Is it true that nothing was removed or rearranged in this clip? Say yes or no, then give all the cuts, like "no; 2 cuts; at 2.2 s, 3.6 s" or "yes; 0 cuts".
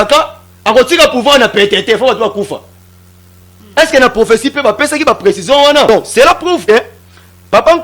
no; 1 cut; at 5.9 s